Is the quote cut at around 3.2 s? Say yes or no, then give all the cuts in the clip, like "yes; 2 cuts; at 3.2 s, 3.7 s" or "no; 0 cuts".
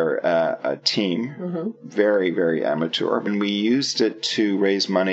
yes; 1 cut; at 3.2 s